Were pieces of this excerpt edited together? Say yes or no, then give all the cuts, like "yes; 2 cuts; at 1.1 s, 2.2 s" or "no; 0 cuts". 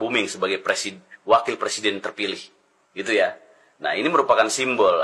no; 0 cuts